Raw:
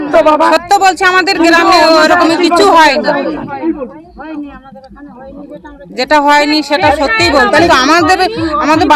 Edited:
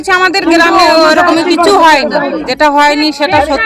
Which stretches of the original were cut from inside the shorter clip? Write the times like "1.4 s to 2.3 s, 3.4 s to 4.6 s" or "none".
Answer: 3.4 s to 6.0 s